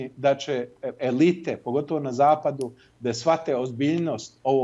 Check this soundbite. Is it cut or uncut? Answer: uncut